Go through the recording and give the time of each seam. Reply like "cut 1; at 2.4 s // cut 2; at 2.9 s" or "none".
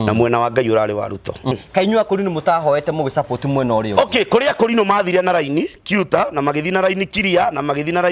cut 1; at 1.6 s